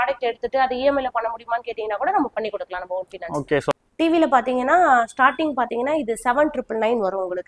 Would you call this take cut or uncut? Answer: cut